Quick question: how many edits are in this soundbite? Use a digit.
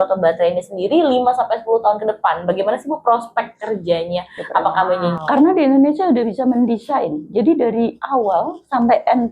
1